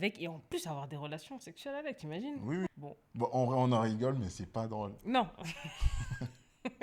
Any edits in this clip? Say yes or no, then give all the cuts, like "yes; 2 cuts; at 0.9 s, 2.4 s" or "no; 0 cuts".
yes; 1 cut; at 2.7 s